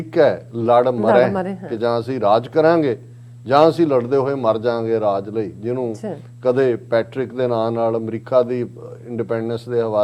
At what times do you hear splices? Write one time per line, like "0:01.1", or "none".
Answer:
none